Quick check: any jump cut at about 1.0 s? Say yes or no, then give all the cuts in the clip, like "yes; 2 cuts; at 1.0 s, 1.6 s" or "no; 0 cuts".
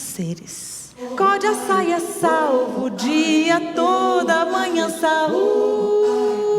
yes; 1 cut; at 1.0 s